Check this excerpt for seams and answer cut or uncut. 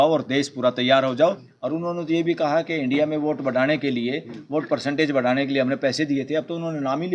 cut